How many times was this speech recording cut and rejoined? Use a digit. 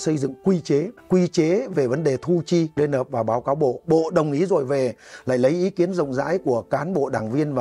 2